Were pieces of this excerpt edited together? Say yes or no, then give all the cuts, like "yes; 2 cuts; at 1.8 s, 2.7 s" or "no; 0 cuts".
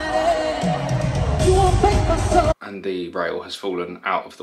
yes; 1 cut; at 2.5 s